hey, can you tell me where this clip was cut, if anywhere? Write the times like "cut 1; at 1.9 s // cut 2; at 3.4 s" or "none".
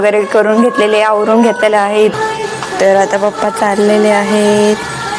cut 1; at 2.1 s